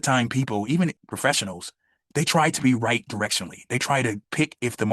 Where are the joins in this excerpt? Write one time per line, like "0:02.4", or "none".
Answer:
0:01.0